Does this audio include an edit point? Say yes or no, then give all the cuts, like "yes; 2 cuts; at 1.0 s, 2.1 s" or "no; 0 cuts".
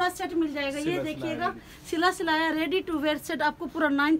no; 0 cuts